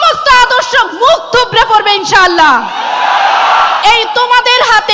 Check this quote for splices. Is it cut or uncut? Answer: uncut